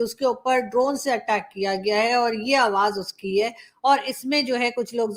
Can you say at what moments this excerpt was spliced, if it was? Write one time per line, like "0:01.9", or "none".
none